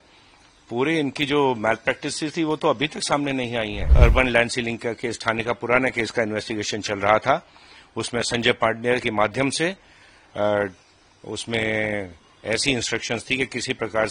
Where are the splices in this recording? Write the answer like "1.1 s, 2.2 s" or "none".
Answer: 3.9 s

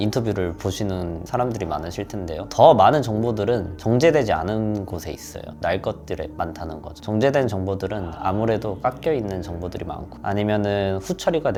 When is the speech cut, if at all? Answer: none

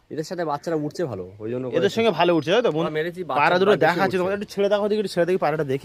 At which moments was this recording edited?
none

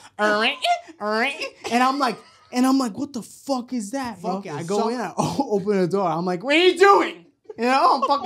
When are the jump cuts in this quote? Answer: 4.5 s

